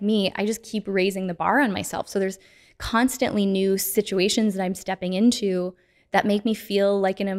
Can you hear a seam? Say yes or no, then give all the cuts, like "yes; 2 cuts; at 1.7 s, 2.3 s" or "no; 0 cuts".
no; 0 cuts